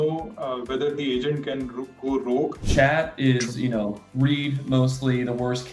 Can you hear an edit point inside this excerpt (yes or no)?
yes